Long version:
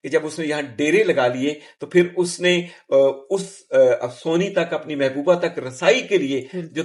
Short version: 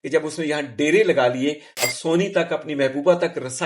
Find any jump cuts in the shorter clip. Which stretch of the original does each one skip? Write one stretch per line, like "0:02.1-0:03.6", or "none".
0:01.8-0:04.1